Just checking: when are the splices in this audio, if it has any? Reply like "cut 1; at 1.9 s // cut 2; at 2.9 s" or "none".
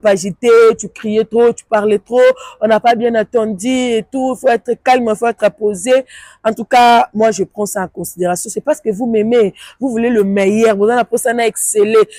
none